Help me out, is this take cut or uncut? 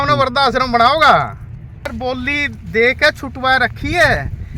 cut